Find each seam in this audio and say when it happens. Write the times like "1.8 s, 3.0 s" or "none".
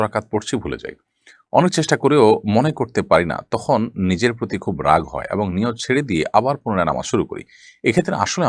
none